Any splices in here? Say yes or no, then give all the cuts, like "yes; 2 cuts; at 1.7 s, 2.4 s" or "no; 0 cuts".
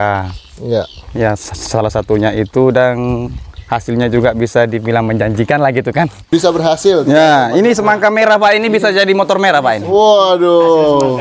yes; 1 cut; at 6.3 s